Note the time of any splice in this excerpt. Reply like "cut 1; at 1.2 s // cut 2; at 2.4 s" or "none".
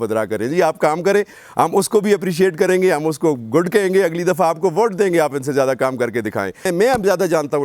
cut 1; at 6.7 s